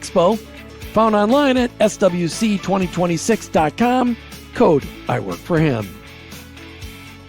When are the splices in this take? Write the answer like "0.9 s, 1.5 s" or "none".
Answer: 5.9 s